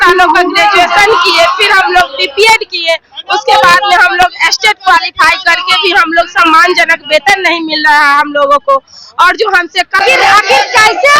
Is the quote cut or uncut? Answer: cut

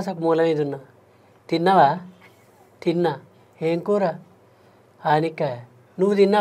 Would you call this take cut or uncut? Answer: uncut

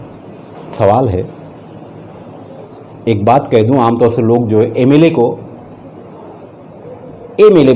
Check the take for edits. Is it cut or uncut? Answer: cut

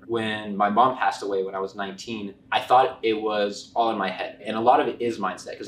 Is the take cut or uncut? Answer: cut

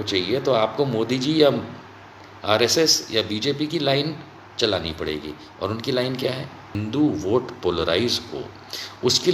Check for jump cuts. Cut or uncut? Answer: cut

